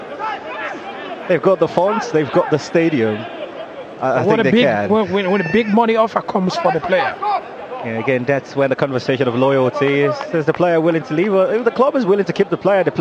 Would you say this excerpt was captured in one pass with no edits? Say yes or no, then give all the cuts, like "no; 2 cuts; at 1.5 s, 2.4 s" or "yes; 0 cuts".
yes; 0 cuts